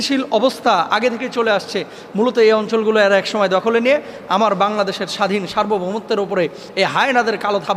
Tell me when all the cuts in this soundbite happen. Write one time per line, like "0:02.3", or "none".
none